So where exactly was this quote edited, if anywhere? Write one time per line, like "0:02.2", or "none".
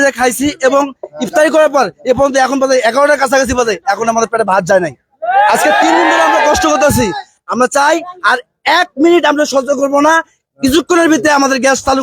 none

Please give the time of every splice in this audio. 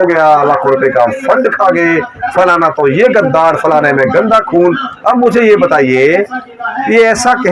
none

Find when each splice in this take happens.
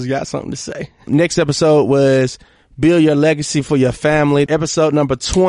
0:01.1
0:04.5

